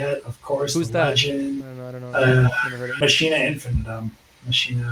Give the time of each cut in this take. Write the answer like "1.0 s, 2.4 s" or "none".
3.0 s